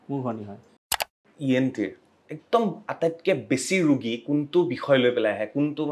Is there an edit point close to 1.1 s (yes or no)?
yes